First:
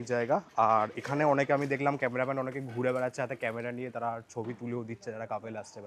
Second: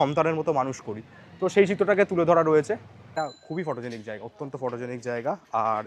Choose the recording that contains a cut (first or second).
second